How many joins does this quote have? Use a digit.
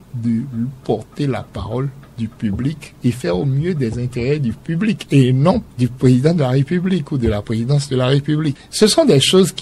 3